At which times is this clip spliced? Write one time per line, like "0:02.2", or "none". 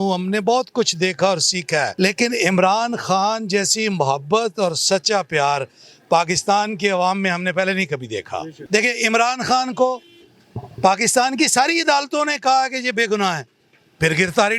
0:01.9
0:08.5